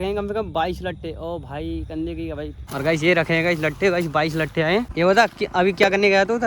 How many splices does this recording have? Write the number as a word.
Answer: two